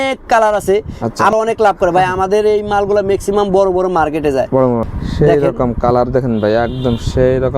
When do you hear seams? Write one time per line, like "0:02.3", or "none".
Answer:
0:01.3
0:04.8